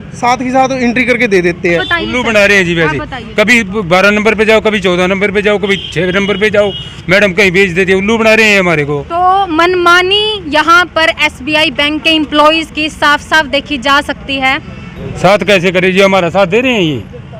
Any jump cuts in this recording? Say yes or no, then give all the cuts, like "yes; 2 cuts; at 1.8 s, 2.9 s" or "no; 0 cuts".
yes; 1 cut; at 1.9 s